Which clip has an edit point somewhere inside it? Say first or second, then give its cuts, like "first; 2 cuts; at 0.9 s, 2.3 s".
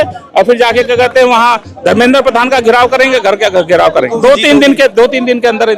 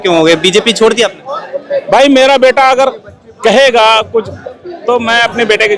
first; 1 cut; at 4.1 s